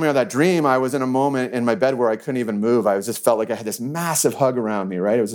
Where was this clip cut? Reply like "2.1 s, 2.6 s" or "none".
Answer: none